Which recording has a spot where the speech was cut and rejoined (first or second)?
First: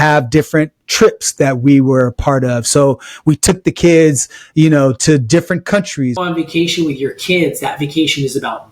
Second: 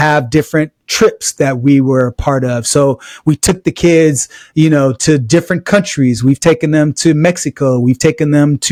first